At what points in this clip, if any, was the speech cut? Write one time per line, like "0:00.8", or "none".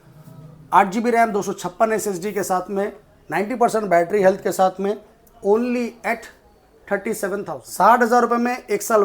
0:07.6